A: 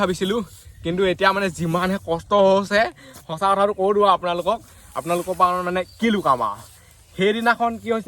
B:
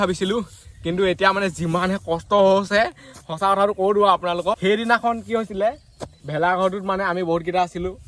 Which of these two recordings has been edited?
B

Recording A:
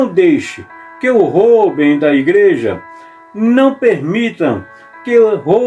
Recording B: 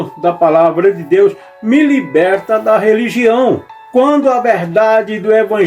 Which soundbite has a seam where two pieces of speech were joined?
B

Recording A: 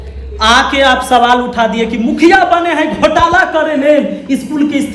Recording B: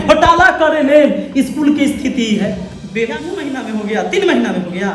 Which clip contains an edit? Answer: B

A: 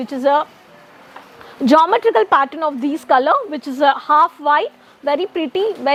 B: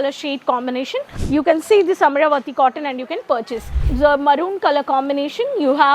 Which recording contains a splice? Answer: B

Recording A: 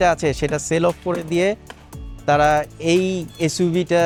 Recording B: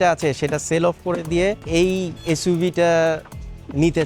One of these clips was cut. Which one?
B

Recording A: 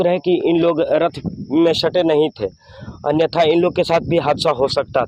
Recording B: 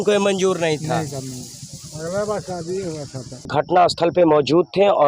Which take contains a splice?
B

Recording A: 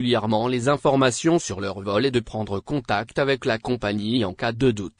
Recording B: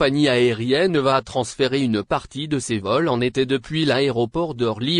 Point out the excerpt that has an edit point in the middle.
B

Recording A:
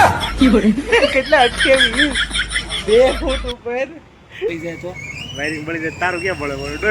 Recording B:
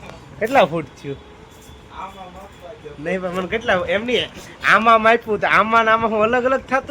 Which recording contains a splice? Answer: A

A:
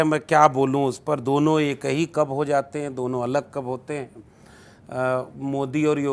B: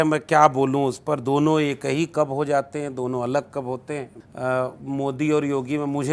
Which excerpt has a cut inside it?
B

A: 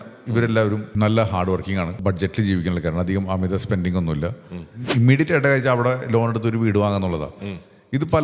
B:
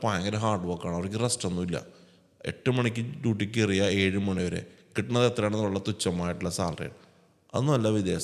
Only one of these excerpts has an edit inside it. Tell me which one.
A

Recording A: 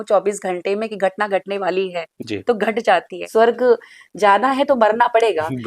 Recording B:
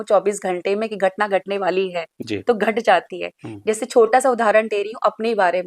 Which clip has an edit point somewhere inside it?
A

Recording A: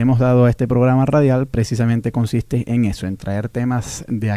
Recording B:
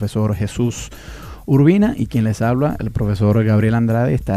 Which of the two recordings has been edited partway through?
B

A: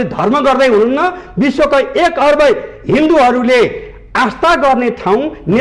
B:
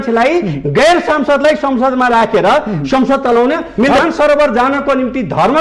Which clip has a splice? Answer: B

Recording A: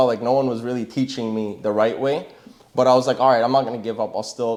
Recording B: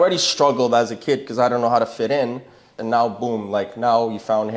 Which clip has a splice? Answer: B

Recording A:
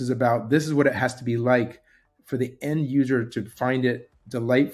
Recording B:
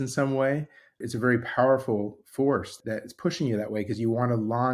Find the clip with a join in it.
B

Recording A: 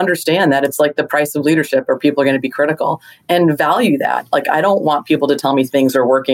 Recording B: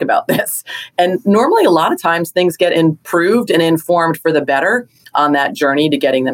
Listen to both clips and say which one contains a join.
B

